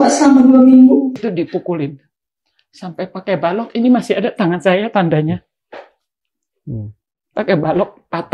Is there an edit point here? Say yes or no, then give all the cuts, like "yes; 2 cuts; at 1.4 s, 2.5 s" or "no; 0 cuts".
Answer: yes; 1 cut; at 1.2 s